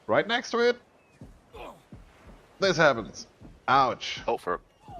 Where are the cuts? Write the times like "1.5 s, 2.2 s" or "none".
4.1 s